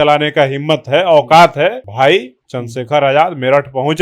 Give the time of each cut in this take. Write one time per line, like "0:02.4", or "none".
0:01.8

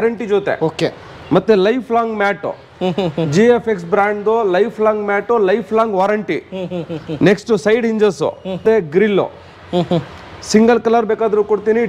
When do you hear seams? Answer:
0:08.6

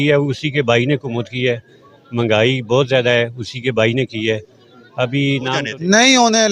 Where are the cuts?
0:05.6

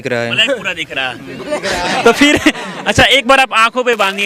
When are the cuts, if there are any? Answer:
none

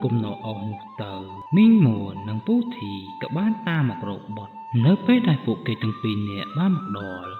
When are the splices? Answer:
0:01.3

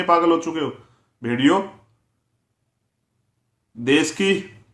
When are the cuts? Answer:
none

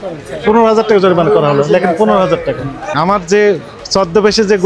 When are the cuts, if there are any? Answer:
0:02.8

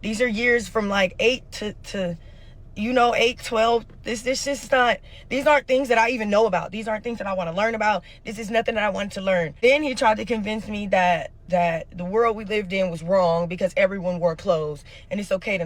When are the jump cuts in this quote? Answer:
0:09.5

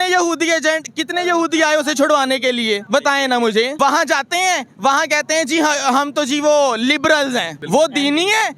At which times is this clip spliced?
0:02.8
0:03.7
0:07.5

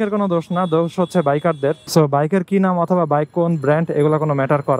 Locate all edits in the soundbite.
0:01.8

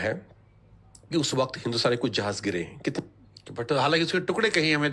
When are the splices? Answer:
0:03.0

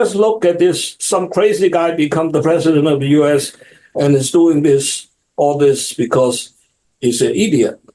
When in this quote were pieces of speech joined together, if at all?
0:00.9

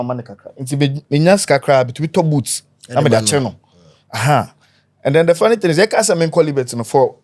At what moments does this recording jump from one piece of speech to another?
none

